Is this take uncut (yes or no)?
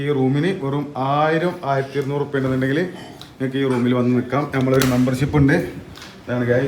yes